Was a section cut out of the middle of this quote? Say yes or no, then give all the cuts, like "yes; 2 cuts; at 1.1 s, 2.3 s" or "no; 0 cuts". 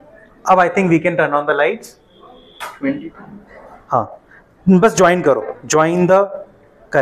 no; 0 cuts